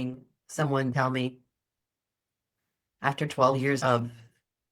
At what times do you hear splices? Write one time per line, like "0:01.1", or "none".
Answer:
0:03.8

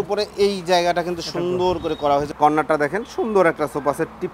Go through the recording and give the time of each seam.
0:02.3

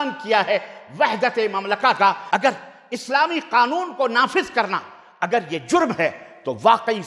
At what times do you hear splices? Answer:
0:02.2

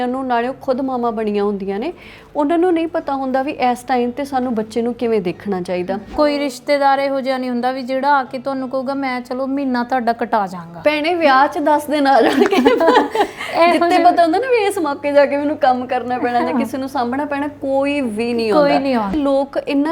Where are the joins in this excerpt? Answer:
0:06.0
0:19.1

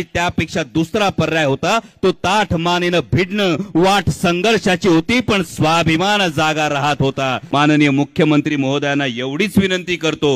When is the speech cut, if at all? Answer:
0:07.4

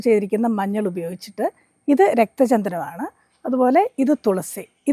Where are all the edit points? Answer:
none

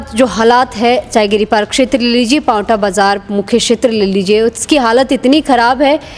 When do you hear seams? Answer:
none

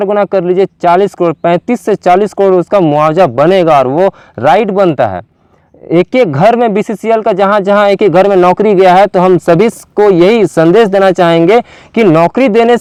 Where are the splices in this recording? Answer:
none

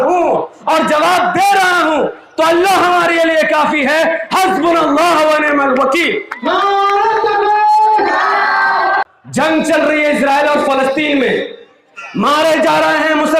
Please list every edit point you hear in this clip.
0:09.0

